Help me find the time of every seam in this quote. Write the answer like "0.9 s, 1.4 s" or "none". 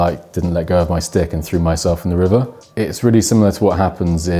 2.5 s